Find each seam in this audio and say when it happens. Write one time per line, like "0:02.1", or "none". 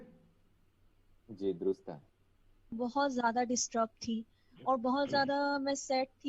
0:02.7